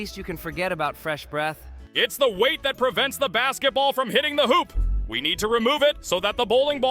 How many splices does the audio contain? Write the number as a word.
zero